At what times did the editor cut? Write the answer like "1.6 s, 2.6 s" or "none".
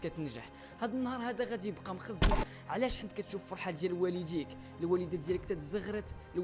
2.4 s